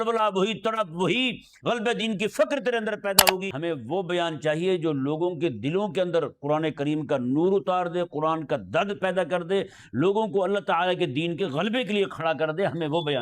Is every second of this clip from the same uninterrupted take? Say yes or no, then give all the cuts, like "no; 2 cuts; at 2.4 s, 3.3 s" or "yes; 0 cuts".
no; 1 cut; at 3.5 s